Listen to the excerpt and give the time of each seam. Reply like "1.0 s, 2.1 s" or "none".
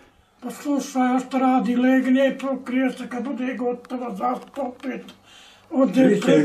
none